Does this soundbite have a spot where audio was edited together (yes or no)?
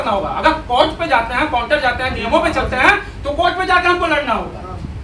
no